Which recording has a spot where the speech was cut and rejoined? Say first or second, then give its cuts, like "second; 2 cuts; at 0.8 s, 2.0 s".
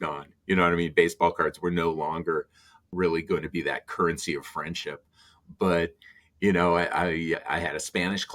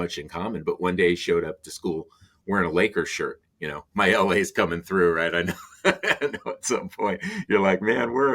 first; 2 cuts; at 2.8 s, 7.4 s